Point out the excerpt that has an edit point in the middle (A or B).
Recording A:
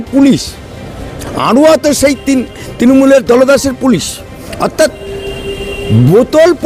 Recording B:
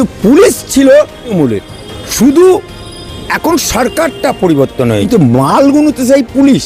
B